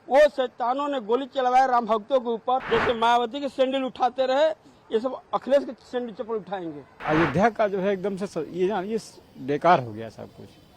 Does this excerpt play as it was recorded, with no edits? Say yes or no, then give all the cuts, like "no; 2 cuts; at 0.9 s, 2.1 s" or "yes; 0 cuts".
no; 2 cuts; at 2.6 s, 7.0 s